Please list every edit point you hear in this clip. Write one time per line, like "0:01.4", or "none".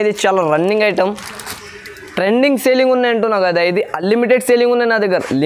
none